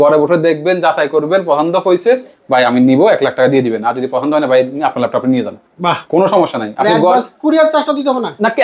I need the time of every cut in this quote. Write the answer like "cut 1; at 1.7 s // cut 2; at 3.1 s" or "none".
none